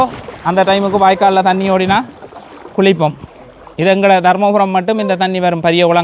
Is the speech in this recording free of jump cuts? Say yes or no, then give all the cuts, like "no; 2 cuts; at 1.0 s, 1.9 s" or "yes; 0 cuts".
yes; 0 cuts